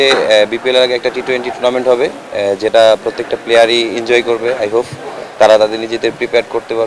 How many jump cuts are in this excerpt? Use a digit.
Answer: 0